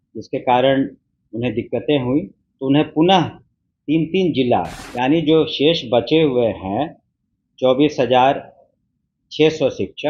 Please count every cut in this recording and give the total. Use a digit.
1